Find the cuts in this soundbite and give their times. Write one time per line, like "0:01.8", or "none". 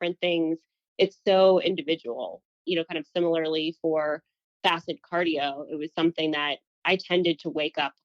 0:02.5
0:06.7

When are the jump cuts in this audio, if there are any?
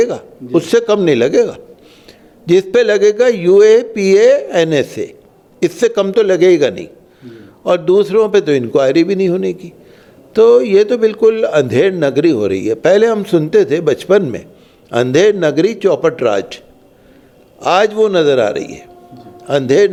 none

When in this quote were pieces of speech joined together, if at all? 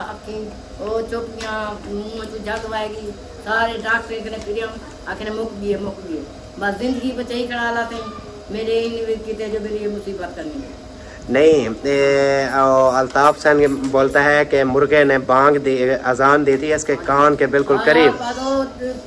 none

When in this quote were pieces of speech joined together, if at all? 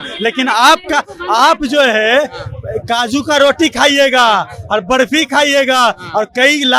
none

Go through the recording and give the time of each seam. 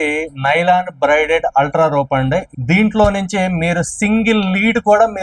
0:02.5

